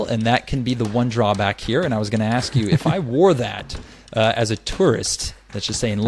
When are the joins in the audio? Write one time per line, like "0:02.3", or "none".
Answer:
none